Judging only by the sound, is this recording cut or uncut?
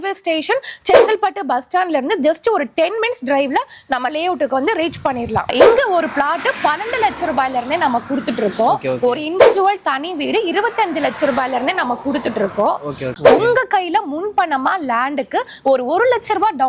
cut